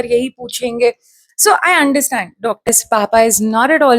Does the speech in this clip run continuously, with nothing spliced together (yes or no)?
no